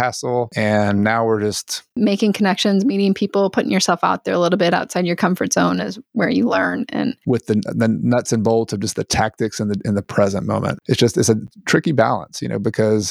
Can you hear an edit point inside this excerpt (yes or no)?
yes